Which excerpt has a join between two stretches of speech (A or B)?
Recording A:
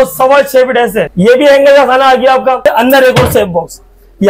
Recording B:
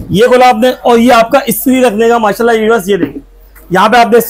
A